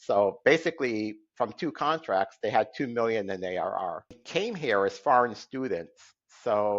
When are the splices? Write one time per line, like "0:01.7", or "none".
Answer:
0:04.2